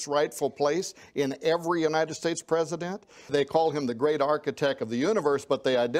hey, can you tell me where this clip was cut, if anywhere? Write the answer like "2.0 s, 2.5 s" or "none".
3.3 s